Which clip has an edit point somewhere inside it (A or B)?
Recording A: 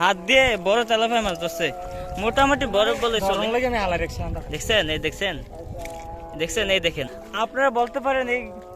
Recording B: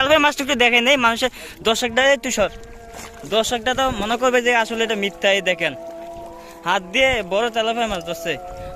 A